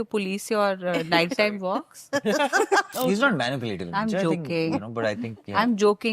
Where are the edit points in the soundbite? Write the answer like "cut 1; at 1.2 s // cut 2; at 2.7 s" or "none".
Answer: cut 1; at 2.9 s